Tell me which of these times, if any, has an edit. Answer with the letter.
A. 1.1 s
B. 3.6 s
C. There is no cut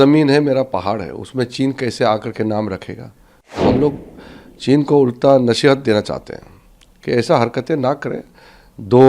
B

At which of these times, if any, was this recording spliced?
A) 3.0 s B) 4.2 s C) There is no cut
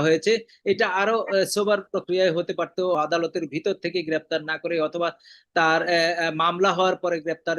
A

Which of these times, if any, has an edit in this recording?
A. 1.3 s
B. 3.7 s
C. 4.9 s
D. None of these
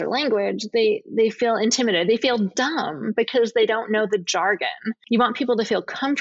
C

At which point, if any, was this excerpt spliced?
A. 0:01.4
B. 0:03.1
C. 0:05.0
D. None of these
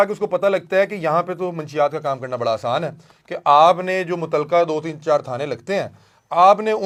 D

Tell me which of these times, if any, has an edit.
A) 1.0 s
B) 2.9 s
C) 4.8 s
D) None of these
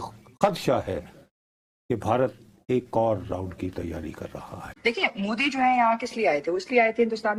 D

